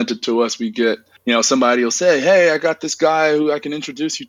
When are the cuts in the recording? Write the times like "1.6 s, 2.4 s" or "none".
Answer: none